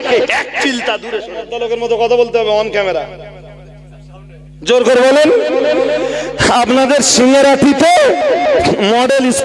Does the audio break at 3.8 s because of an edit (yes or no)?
no